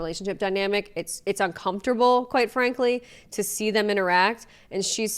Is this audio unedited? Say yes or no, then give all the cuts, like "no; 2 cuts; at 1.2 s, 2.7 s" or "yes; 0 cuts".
yes; 0 cuts